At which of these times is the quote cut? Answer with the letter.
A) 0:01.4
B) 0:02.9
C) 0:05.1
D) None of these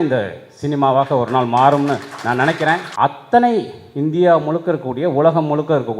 B